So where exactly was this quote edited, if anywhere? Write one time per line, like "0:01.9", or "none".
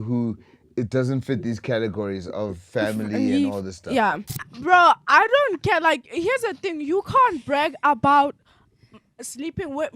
0:04.3